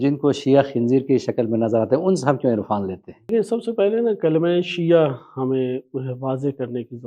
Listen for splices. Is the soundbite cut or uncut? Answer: cut